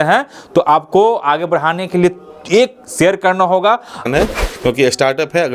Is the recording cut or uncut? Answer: cut